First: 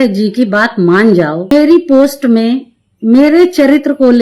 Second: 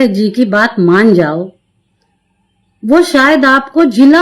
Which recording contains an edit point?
first; 1 cut; at 1.5 s

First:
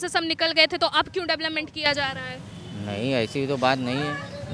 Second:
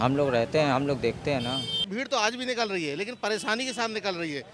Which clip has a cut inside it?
second; 1 cut; at 1.8 s

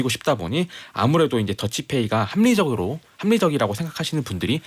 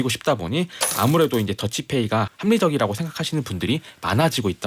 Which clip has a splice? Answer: second; 1 cut; at 2.3 s

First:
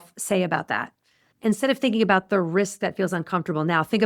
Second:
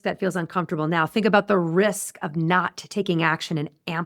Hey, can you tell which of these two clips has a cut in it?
first; 1 cut; at 1.4 s

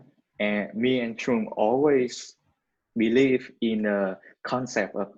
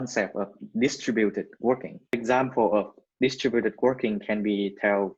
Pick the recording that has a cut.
second; 1 cut; at 2.1 s

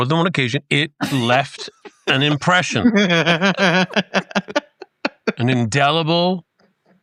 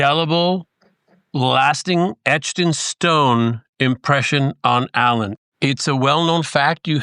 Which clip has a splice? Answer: second; 1 cut; at 5.4 s

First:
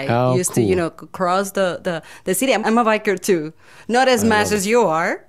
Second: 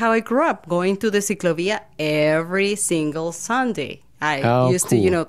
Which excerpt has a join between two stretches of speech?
first; 1 cut; at 2.6 s

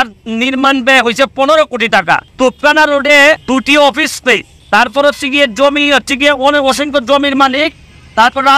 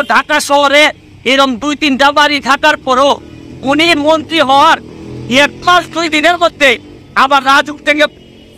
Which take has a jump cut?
first; 3 cuts; at 2.3 s, 3.4 s, 4.5 s

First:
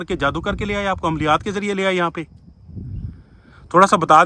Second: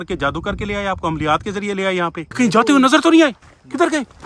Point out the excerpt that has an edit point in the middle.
second; 1 cut; at 2.2 s

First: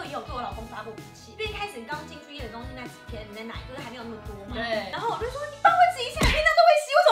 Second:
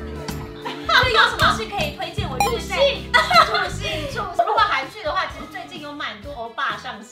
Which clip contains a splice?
second; 1 cut; at 4.4 s

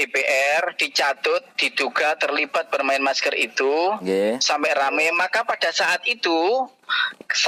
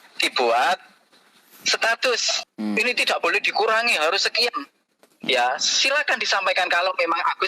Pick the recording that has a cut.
second; 1 cut; at 2.4 s

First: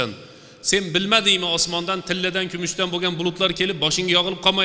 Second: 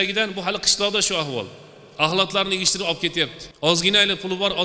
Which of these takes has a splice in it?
second; 1 cut; at 3.7 s

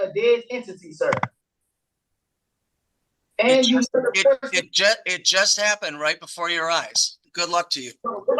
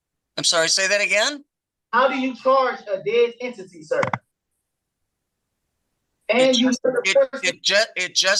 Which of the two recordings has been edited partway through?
first; 1 cut; at 7.2 s

